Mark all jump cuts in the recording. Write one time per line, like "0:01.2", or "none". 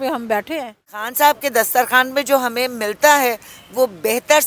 0:01.1